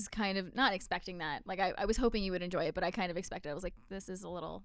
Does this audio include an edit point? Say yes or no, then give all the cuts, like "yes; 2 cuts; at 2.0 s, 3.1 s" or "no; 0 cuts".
no; 0 cuts